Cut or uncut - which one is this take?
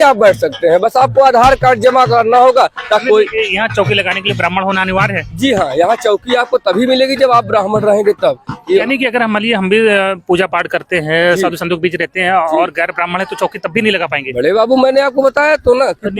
cut